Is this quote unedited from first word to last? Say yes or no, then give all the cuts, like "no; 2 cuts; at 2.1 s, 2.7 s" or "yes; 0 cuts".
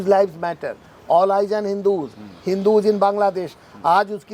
yes; 0 cuts